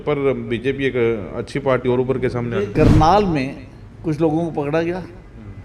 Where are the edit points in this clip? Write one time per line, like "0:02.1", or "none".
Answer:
0:02.7

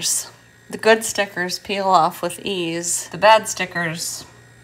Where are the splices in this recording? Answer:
0:03.0

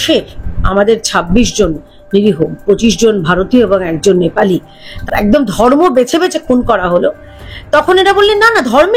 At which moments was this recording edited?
0:04.9

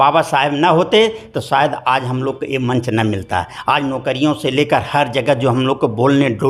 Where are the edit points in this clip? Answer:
none

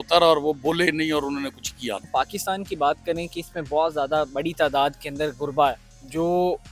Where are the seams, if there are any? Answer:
0:02.1

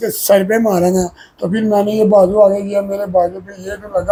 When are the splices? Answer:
none

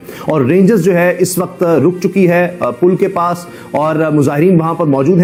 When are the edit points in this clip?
none

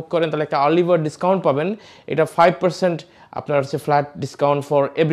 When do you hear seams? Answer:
none

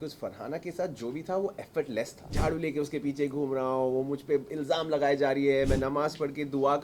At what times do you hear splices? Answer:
0:02.4

